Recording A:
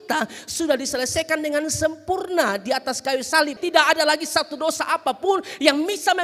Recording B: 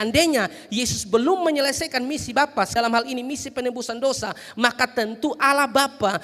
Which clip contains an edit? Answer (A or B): B